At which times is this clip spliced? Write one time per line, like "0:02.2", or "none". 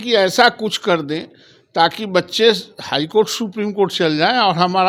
none